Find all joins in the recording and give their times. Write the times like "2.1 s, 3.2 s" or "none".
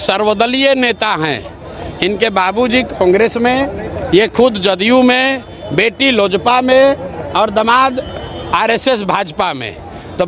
none